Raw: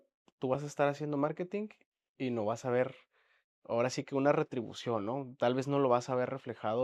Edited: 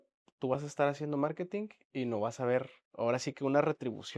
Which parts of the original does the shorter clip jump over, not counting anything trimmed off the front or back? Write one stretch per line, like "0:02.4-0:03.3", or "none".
0:01.8-0:02.0
0:03.1-0:03.5